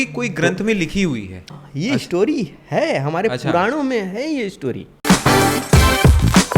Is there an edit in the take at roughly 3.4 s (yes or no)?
no